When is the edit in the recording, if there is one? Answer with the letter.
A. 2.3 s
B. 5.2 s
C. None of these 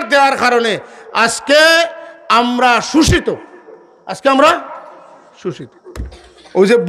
C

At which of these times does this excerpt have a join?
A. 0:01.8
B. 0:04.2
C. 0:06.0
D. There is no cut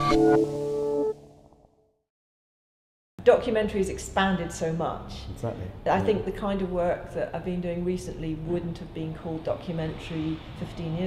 D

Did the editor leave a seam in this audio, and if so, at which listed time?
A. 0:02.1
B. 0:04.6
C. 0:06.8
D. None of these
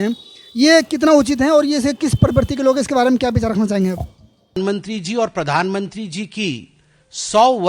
B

